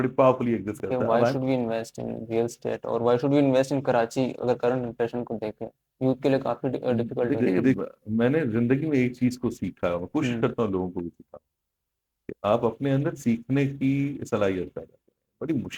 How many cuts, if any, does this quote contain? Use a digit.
2